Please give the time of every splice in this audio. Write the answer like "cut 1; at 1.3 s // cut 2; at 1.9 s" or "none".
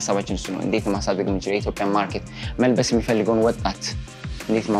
none